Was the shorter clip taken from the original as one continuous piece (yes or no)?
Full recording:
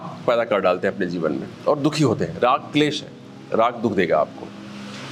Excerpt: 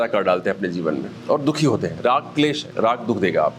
no